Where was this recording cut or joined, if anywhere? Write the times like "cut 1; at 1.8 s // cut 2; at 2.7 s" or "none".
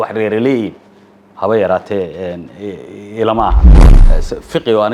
cut 1; at 3.9 s